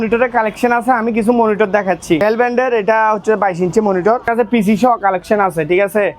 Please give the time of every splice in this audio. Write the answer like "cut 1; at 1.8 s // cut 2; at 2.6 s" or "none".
cut 1; at 2.2 s // cut 2; at 4.3 s